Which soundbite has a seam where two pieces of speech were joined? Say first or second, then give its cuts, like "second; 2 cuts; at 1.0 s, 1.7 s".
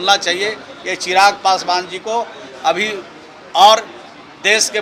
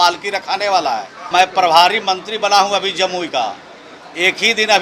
second; 1 cut; at 1.3 s